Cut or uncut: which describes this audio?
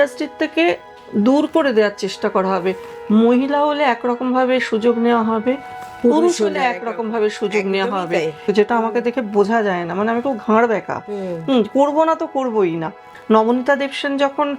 cut